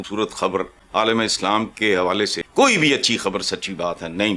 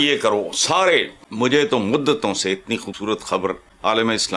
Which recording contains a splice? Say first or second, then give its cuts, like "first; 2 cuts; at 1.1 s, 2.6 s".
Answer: second; 1 cut; at 1.2 s